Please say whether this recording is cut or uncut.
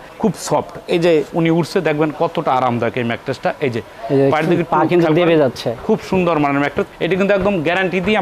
uncut